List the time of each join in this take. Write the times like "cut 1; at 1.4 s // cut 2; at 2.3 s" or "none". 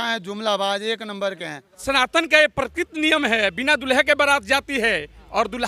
cut 1; at 1.8 s